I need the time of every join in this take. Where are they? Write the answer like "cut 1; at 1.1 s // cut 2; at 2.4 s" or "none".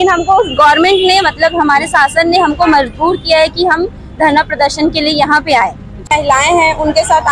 cut 1; at 6.1 s